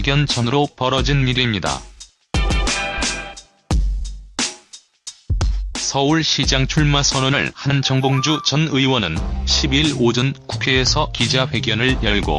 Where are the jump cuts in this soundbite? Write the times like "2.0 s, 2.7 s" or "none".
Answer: 10.5 s